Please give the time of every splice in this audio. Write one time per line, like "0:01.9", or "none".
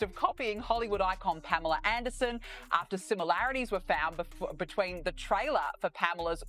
none